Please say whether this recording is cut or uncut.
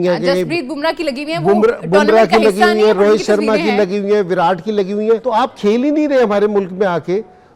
cut